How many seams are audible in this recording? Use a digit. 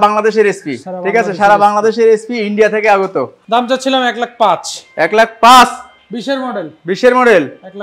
1